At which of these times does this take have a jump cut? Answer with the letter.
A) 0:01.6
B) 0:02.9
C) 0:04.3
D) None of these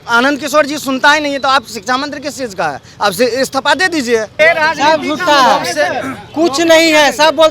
C